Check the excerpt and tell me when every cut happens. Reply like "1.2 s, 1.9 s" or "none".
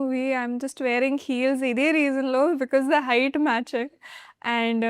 none

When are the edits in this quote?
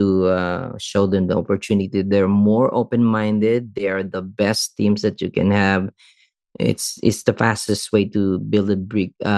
none

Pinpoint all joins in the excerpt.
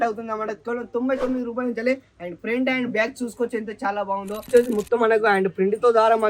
4.5 s

